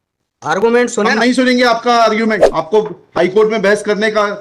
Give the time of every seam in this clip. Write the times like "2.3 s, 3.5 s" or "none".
2.5 s